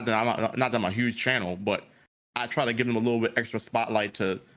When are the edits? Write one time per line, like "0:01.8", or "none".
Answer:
none